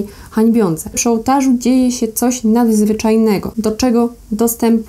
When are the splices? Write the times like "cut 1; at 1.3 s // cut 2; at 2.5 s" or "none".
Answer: cut 1; at 1.0 s // cut 2; at 3.5 s